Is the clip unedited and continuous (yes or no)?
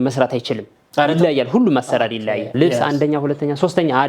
no